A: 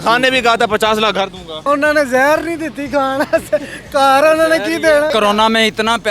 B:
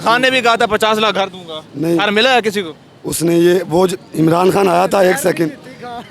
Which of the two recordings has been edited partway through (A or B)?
A